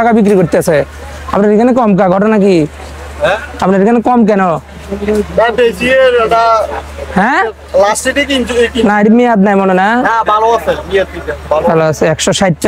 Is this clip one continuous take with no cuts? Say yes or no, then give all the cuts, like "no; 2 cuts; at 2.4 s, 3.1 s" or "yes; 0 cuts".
yes; 0 cuts